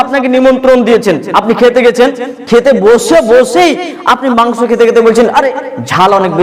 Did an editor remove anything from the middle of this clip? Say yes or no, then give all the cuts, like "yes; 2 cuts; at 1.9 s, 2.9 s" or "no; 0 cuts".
no; 0 cuts